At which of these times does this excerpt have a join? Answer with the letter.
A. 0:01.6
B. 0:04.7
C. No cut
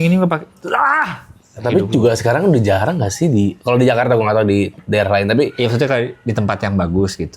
A